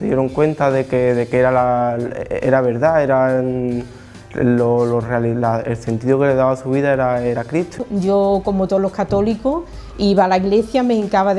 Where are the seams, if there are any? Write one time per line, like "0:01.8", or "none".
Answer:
0:07.8